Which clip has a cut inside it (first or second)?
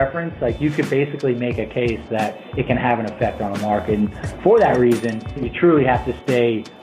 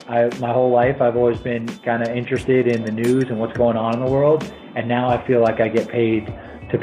first